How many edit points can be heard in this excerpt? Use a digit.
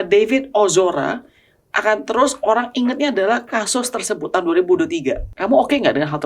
1